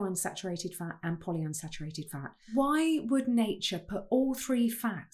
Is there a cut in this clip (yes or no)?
yes